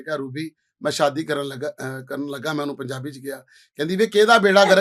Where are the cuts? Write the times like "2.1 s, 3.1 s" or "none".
none

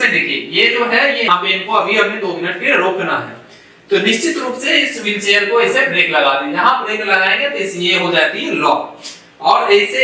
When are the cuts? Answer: 1.3 s

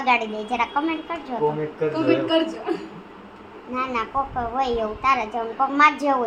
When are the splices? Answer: none

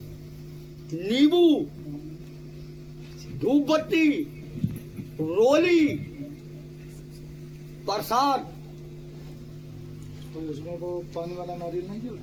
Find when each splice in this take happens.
none

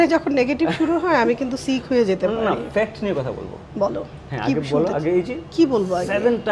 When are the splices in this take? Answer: none

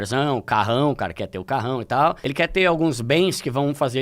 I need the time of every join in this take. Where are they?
2.2 s

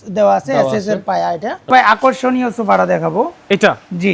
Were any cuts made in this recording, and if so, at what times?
1.7 s

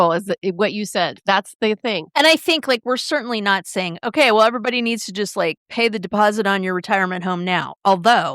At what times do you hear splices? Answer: 1.2 s, 2.1 s

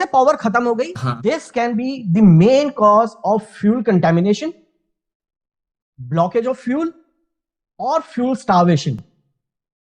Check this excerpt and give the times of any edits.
1.0 s

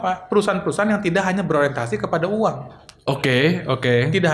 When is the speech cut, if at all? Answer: none

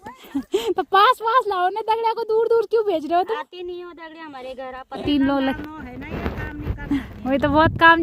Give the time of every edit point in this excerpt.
5.0 s

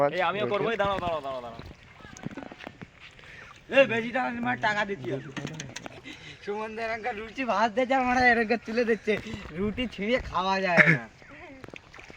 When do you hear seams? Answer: 6.0 s

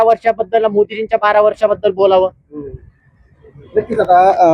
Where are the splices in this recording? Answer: none

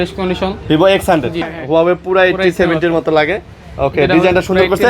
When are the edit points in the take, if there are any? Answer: 1.5 s

